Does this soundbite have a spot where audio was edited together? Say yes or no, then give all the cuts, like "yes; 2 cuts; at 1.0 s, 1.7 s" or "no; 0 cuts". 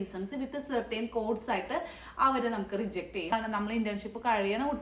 yes; 1 cut; at 3.3 s